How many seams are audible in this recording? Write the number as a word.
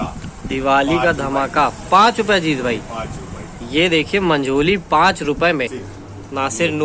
one